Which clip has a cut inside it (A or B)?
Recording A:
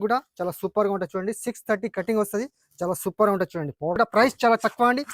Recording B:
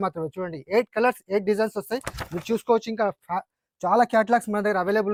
A